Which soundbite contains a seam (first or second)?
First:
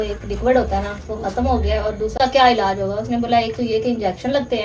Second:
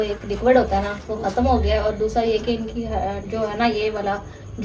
first